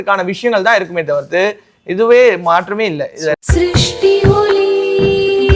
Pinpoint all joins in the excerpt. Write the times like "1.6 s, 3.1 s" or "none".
3.4 s